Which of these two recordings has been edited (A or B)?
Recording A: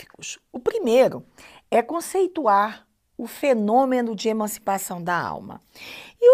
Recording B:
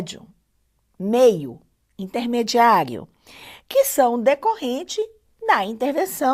B